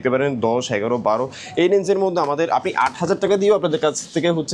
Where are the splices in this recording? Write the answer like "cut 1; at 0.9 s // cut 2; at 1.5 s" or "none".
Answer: none